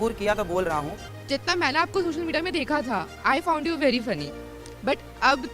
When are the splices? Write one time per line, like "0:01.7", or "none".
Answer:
0:01.0